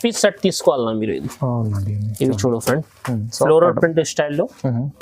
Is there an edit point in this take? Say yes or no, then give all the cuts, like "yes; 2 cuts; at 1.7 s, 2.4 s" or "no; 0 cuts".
yes; 1 cut; at 3.2 s